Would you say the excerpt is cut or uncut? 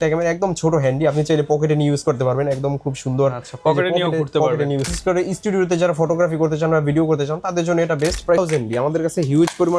cut